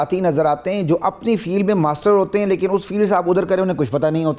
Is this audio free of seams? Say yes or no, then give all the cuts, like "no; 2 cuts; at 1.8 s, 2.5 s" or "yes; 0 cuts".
yes; 0 cuts